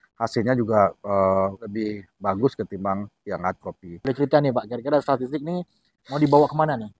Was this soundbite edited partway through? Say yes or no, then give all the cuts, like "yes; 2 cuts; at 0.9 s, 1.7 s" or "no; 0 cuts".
yes; 2 cuts; at 1.6 s, 4.0 s